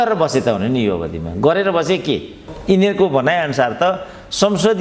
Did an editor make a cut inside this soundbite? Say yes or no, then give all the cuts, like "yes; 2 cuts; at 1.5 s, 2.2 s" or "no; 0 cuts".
yes; 1 cut; at 2.5 s